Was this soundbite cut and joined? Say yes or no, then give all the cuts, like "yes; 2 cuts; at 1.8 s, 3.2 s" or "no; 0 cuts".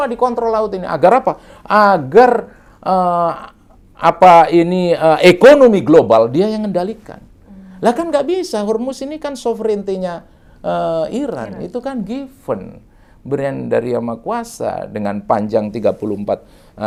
no; 0 cuts